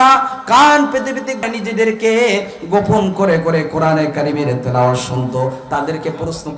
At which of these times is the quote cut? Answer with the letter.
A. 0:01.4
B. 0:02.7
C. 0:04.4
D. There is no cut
A